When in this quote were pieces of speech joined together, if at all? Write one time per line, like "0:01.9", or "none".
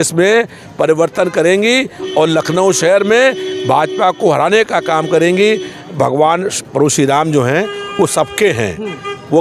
0:06.0